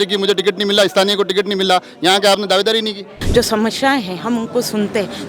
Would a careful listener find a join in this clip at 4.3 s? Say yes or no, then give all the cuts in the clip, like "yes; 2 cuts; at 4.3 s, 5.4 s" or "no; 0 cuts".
no; 1 cut; at 3.1 s